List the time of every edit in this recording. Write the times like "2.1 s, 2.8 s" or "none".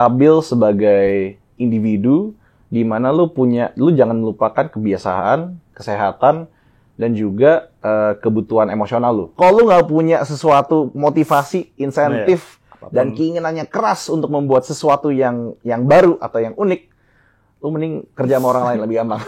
5.7 s, 9.3 s